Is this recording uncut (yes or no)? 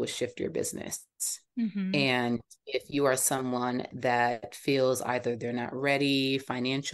yes